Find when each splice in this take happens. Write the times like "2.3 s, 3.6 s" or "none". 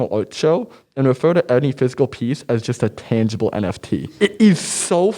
4.1 s